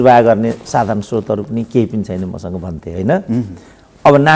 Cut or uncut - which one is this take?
uncut